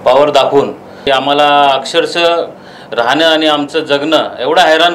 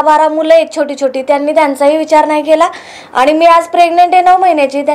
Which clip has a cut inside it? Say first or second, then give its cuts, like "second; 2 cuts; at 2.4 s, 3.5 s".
first; 1 cut; at 0.9 s